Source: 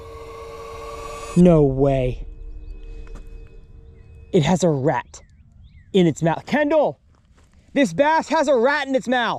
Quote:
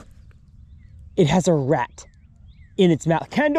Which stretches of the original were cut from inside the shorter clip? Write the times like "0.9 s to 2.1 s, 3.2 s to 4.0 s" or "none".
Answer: none